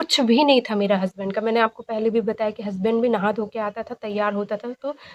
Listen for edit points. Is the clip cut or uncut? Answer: uncut